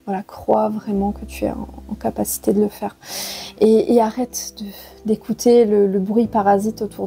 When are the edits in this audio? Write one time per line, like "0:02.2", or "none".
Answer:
none